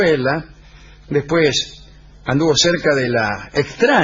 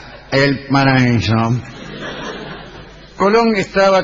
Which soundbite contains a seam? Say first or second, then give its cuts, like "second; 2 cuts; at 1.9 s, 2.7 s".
second; 1 cut; at 1.6 s